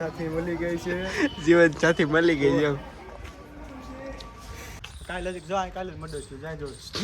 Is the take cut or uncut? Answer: cut